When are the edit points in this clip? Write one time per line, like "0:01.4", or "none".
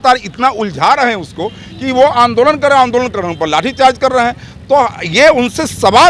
none

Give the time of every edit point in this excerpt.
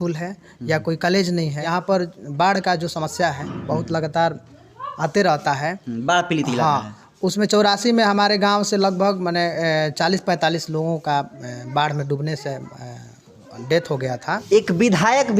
0:01.7
0:14.4

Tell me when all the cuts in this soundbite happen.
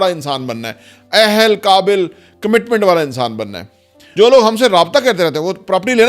0:04.0

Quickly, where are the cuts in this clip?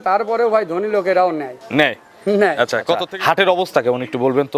0:03.1

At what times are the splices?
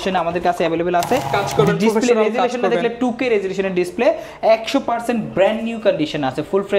0:01.3

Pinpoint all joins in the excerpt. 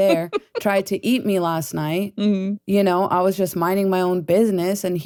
none

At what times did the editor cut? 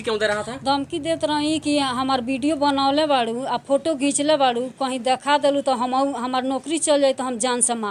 none

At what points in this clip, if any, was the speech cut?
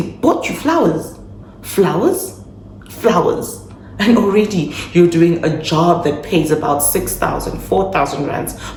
none

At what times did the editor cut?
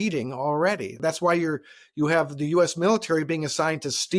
0:01.0

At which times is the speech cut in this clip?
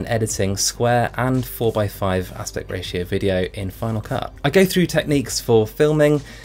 0:04.3

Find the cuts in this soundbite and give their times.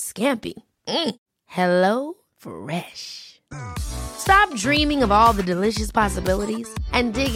none

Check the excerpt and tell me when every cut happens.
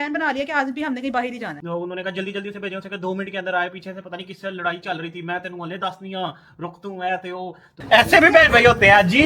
0:01.6
0:07.8

